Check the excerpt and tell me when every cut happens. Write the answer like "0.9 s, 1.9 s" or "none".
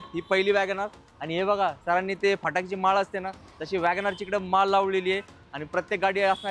none